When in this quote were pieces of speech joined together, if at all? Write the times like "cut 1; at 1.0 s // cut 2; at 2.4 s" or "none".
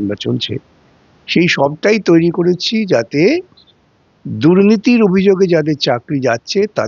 none